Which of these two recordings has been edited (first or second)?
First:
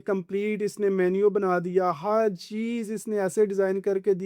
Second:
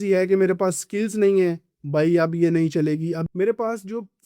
second